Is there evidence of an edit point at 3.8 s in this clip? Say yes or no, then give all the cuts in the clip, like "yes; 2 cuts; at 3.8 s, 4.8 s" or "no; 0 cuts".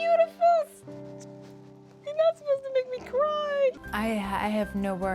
yes; 1 cut; at 3.8 s